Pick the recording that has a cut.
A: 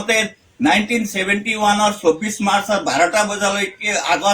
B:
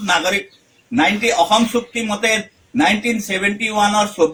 A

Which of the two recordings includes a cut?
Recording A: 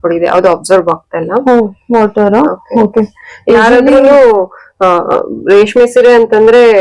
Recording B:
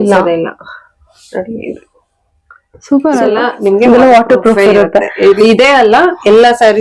B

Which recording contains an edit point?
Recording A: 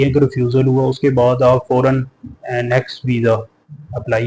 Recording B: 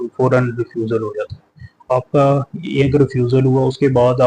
B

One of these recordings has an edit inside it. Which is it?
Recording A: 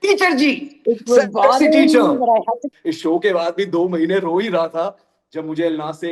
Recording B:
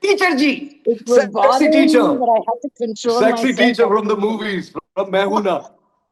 A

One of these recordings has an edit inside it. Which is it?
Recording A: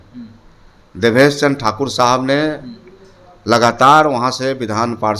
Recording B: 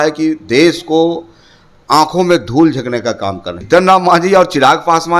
B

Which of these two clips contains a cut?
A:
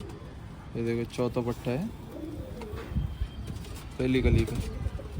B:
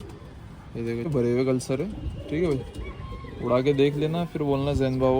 B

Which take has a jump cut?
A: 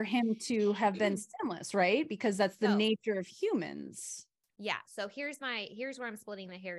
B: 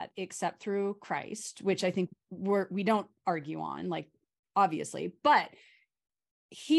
A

